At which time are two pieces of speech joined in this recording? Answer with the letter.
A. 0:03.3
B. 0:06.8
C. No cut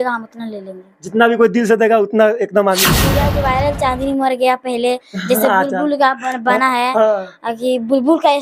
A